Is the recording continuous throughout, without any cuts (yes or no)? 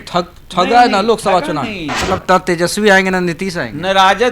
no